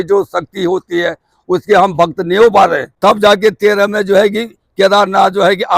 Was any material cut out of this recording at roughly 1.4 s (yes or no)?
no